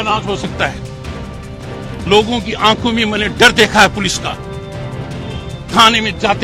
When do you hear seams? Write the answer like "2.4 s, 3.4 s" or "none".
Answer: none